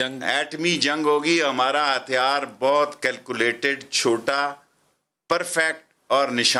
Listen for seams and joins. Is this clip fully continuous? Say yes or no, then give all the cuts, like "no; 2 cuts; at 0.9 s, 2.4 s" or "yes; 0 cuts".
yes; 0 cuts